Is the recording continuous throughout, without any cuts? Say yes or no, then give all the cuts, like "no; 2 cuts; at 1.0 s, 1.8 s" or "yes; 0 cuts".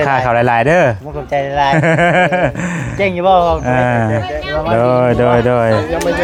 yes; 0 cuts